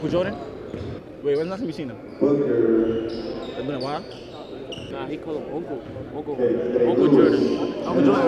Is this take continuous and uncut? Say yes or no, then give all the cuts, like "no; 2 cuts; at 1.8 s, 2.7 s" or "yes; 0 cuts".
no; 2 cuts; at 1.0 s, 4.9 s